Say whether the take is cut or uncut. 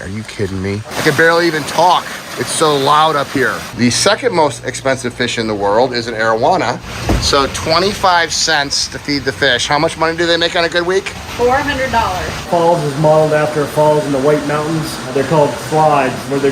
cut